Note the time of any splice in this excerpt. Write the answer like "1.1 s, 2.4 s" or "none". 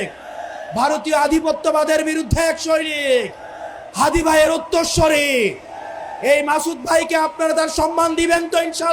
none